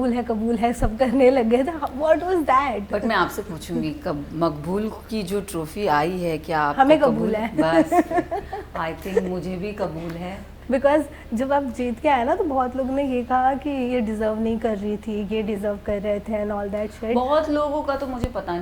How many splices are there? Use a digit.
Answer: 0